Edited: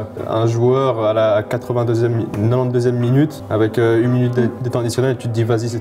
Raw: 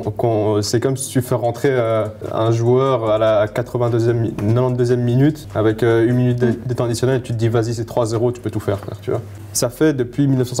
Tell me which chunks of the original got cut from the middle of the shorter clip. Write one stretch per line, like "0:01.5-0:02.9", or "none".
none